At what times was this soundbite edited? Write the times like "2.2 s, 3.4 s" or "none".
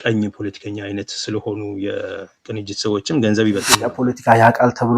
3.8 s